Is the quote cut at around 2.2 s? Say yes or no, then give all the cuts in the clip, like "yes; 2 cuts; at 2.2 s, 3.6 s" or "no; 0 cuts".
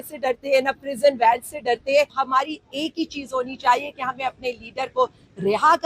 yes; 1 cut; at 2.2 s